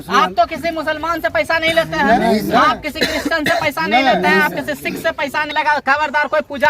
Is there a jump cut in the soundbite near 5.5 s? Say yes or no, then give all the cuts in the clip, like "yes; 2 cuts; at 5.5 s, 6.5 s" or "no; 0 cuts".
yes; 1 cut; at 5.5 s